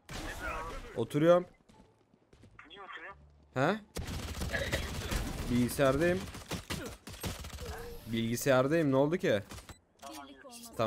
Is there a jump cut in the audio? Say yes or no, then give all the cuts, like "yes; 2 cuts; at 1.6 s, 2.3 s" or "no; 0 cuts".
no; 0 cuts